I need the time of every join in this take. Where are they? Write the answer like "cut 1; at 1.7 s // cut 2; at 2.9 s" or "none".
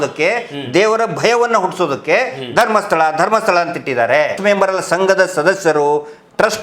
cut 1; at 4.4 s

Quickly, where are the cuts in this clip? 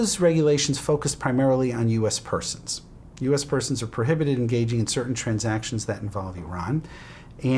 cut 1; at 1.4 s

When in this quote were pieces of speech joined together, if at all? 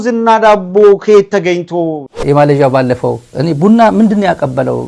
cut 1; at 2.0 s

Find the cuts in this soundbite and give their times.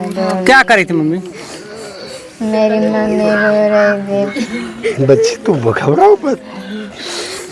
cut 1; at 4.3 s

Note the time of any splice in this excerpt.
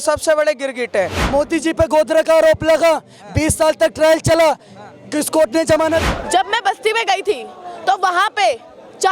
cut 1; at 1.2 s // cut 2; at 6.1 s

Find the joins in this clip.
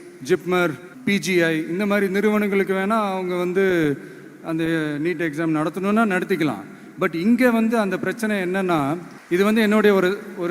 cut 1; at 0.9 s // cut 2; at 9.1 s

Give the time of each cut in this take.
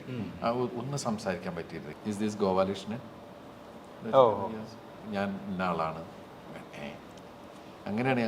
cut 1; at 1.8 s

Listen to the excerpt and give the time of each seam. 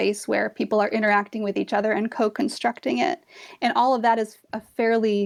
none

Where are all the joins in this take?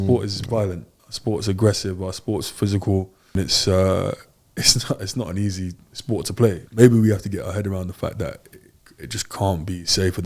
cut 1; at 3.3 s // cut 2; at 6.6 s

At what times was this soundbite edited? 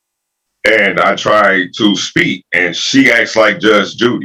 none

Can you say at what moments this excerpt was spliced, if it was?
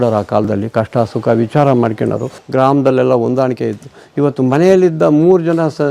cut 1; at 2.3 s

